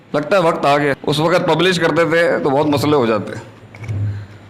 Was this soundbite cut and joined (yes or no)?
yes